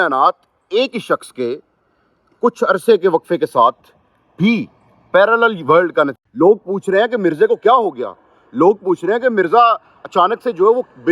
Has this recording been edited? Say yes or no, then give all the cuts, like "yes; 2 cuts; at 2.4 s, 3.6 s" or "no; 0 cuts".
yes; 1 cut; at 6.2 s